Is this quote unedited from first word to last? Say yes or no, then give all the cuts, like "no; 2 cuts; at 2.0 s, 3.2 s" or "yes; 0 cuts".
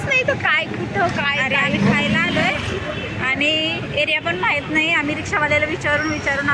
yes; 0 cuts